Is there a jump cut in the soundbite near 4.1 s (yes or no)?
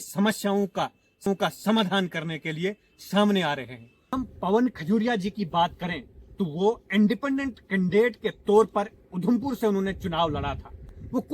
yes